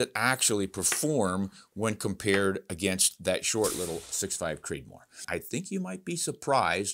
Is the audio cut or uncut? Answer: cut